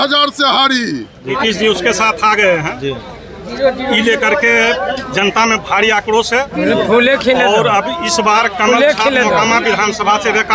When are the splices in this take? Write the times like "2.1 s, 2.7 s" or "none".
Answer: 1.3 s